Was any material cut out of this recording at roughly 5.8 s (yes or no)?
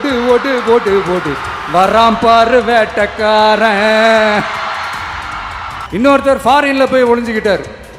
yes